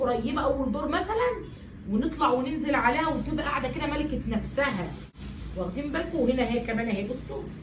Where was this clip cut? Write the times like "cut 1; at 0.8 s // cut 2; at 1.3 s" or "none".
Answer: none